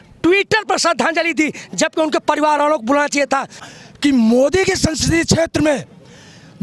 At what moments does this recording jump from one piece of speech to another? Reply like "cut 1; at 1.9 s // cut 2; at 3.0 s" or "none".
cut 1; at 3.7 s